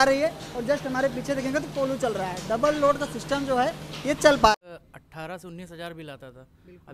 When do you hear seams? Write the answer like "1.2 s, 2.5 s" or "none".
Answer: 4.5 s